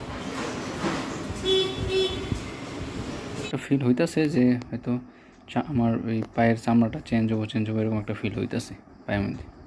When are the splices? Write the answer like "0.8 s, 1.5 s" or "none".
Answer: 3.5 s